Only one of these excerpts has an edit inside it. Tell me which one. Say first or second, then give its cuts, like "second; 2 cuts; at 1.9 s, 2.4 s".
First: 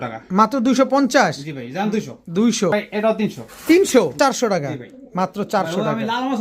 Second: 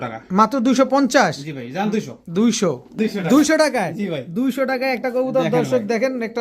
first; 2 cuts; at 2.7 s, 4.1 s